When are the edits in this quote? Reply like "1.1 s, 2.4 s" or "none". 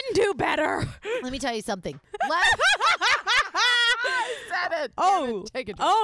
none